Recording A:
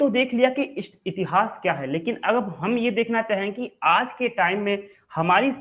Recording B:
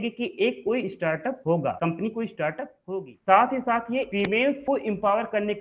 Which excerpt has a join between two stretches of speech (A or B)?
B